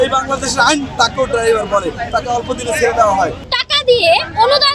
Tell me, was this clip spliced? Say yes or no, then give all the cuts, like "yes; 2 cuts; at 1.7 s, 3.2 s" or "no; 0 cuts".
yes; 1 cut; at 3.5 s